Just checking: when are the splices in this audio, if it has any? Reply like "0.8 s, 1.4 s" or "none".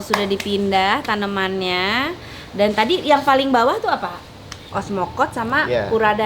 4.6 s